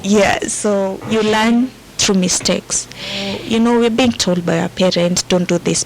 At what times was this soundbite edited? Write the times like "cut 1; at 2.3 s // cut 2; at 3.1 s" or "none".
cut 1; at 1.0 s // cut 2; at 3.3 s